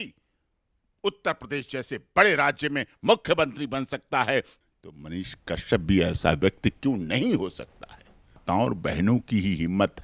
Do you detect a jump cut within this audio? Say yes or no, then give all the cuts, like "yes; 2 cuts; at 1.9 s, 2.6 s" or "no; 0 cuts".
yes; 2 cuts; at 4.6 s, 8.4 s